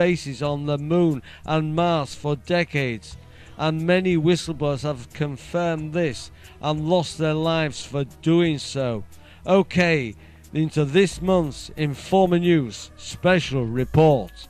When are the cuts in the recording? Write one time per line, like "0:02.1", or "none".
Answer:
0:03.7